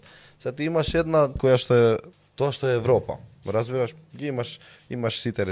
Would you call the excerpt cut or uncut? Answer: cut